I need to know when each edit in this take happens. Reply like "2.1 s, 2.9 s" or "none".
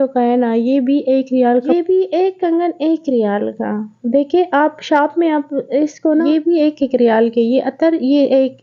1.7 s, 6.2 s